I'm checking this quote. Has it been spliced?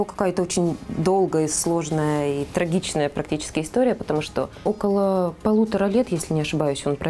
yes; 1 cut; at 4.5 s

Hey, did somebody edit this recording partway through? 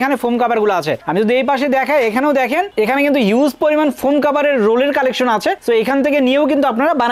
no; 0 cuts

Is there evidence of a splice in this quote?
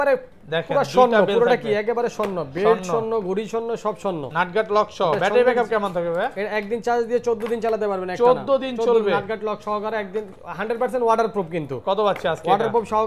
no; 0 cuts

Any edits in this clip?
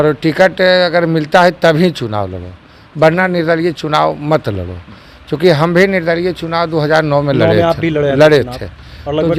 no; 0 cuts

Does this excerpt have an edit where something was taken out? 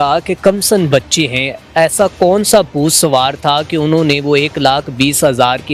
no; 0 cuts

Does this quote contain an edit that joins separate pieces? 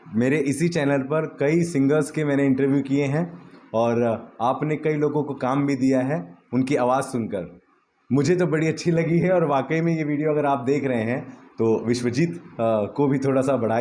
no; 0 cuts

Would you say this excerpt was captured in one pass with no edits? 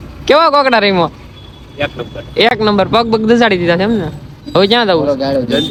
yes; 0 cuts

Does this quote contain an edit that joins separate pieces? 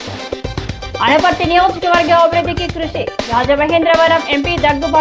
no; 0 cuts

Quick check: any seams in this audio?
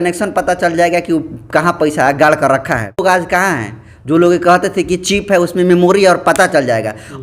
yes; 1 cut; at 3.0 s

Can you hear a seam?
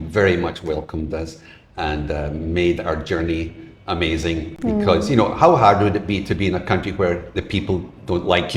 no; 0 cuts

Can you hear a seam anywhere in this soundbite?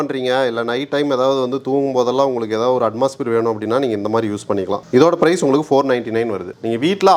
no; 0 cuts

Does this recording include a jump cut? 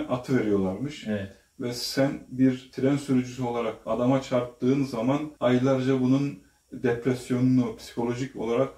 no; 0 cuts

